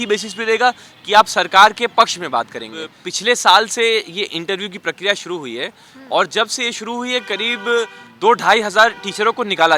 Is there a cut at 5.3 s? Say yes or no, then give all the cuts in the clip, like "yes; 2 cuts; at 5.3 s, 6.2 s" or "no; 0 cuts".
no; 2 cuts; at 3.0 s, 8.0 s